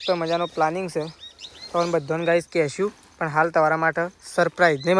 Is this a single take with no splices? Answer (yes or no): yes